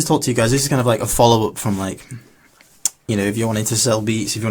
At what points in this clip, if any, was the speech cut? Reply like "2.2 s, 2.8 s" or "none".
none